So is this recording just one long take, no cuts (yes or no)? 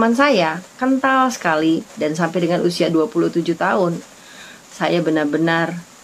yes